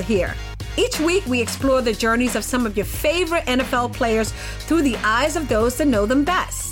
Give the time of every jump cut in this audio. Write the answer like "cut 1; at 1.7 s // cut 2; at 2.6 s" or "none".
none